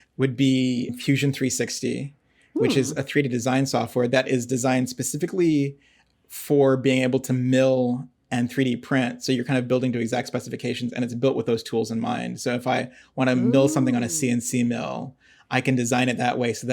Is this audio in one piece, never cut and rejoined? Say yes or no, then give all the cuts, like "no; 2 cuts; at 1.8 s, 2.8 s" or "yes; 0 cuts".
no; 1 cut; at 0.9 s